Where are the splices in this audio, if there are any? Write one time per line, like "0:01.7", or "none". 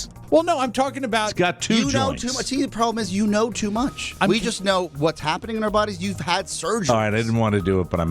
0:04.0